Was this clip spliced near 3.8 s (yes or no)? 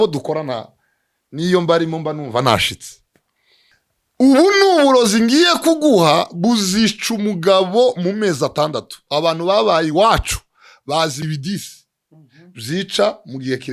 yes